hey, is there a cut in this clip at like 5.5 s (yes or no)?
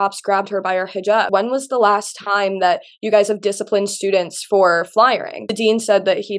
yes